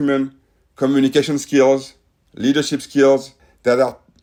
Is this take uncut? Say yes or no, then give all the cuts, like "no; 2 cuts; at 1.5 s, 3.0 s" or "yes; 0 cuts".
yes; 0 cuts